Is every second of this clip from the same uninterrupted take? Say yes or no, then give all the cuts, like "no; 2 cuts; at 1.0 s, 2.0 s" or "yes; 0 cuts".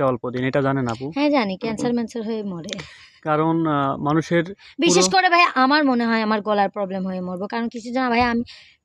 yes; 0 cuts